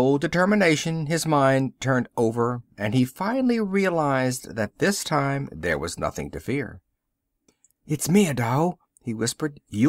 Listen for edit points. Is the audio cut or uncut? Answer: cut